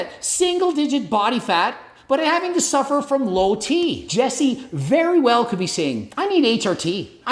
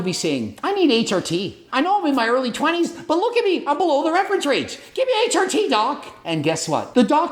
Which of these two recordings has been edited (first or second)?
first